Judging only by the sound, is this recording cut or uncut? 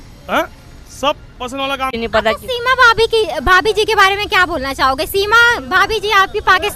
cut